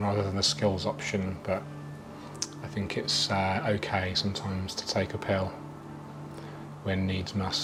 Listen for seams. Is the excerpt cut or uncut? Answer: uncut